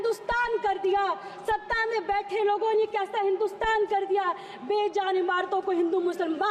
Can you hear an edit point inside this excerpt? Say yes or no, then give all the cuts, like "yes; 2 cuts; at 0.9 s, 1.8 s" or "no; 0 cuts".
no; 0 cuts